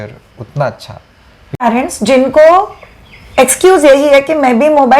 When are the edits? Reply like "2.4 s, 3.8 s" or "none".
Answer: 1.6 s